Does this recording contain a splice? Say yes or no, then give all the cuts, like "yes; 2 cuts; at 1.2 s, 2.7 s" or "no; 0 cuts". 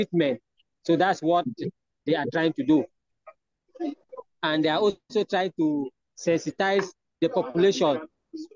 no; 0 cuts